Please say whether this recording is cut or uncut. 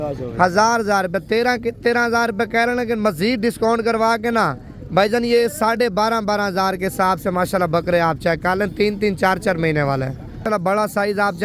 cut